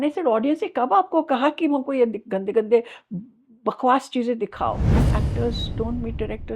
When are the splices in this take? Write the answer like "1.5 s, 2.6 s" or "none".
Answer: 5.2 s